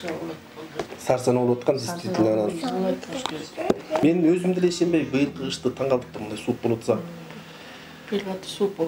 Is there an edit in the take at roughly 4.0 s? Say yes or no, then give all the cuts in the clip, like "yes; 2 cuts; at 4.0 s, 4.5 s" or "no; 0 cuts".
yes; 1 cut; at 4.0 s